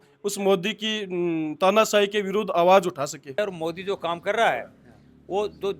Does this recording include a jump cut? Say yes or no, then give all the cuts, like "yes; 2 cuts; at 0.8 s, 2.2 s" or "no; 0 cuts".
yes; 1 cut; at 3.4 s